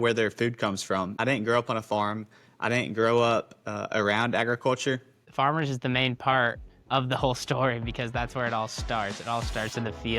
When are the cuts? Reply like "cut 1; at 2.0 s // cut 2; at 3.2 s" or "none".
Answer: cut 1; at 1.2 s // cut 2; at 5.2 s